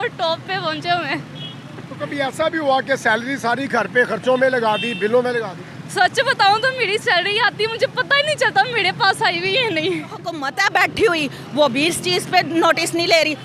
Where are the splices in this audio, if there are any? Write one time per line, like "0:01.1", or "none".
0:10.4